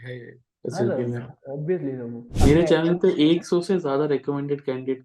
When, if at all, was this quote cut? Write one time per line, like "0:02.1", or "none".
0:02.2